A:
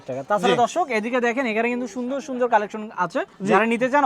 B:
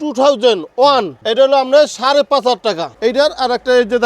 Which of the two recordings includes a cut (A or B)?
B